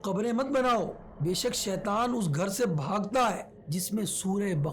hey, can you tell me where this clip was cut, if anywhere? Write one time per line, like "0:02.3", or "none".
0:01.0
0:03.5